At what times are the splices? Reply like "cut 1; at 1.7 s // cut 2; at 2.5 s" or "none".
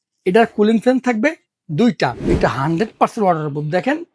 cut 1; at 2.2 s